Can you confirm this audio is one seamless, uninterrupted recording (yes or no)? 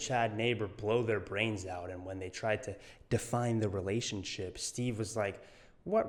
yes